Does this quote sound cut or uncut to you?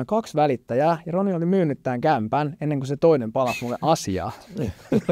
uncut